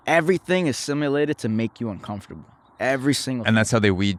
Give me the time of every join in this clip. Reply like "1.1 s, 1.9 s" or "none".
none